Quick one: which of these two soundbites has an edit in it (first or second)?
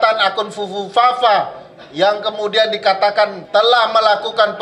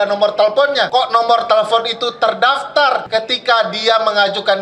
second